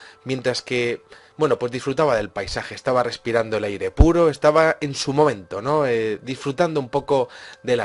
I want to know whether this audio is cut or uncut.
cut